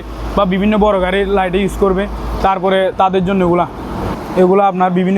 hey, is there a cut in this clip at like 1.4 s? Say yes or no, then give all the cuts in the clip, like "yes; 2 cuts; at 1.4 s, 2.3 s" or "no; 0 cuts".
no; 1 cut; at 4.1 s